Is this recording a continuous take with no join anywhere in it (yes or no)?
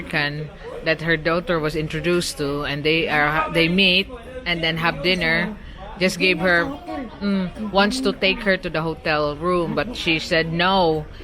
yes